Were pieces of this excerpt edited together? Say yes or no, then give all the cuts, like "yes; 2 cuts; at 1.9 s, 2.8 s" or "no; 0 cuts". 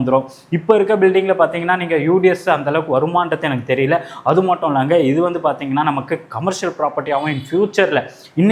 no; 0 cuts